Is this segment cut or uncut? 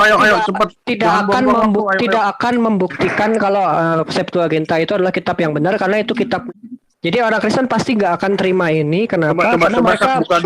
cut